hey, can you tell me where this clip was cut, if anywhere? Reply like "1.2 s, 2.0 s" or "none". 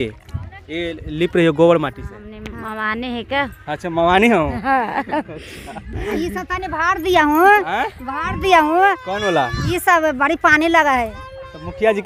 2.4 s